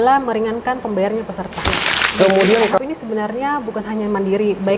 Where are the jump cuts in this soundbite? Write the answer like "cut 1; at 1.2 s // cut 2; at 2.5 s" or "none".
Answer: cut 1; at 2.8 s